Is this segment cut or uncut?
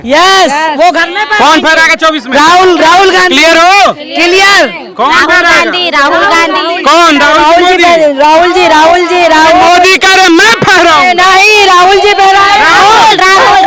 uncut